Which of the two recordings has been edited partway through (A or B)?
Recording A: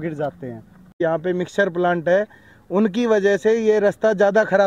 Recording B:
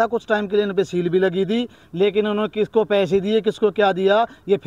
A